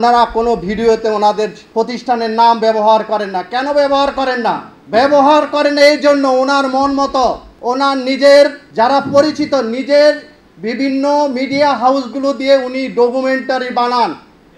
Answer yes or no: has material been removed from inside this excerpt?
yes